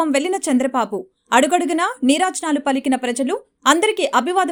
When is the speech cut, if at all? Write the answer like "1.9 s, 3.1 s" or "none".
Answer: none

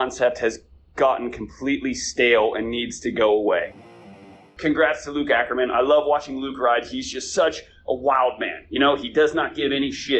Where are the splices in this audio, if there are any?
4.3 s

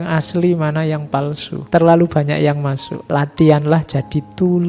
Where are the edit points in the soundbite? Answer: 1.5 s, 2.9 s

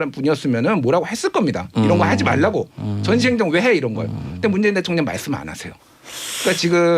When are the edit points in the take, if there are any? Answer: none

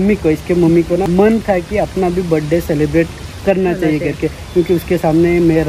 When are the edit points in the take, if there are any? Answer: 1.1 s

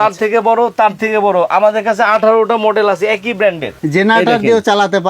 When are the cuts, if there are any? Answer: 3.7 s

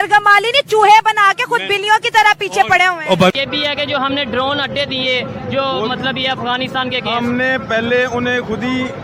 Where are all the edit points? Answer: 3.4 s

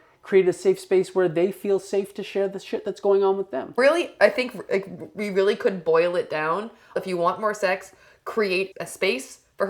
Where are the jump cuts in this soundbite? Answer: 3.8 s, 7.0 s, 8.8 s

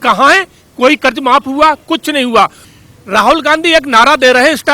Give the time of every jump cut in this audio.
2.6 s

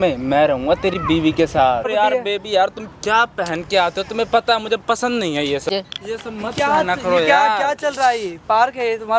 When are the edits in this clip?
1.9 s, 5.7 s

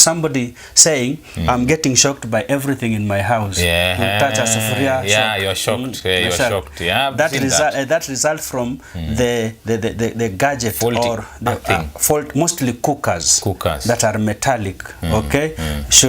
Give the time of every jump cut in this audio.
none

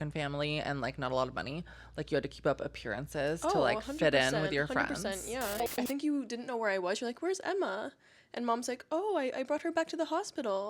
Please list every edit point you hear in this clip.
5.7 s

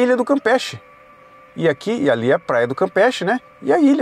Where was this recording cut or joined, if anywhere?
none

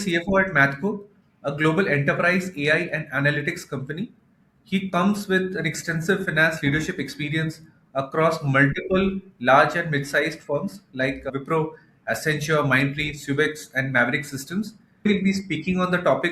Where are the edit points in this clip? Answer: 15.1 s

